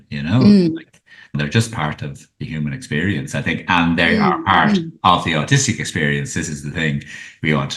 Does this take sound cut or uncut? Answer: cut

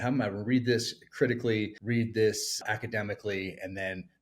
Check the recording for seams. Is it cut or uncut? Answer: cut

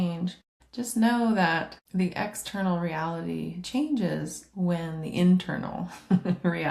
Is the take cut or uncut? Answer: uncut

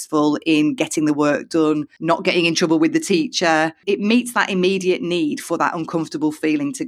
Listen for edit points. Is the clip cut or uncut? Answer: cut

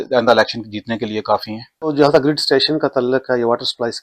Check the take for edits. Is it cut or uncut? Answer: uncut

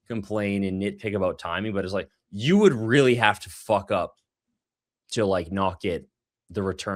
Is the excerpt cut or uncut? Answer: uncut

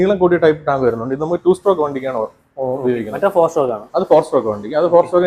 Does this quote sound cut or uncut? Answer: uncut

